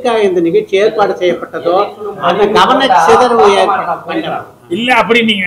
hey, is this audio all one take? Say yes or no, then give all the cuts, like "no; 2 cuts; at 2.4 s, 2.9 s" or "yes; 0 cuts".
yes; 0 cuts